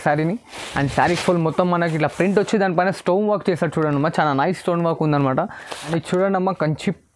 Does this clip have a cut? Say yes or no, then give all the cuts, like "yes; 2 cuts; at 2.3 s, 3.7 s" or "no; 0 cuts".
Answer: yes; 1 cut; at 5.7 s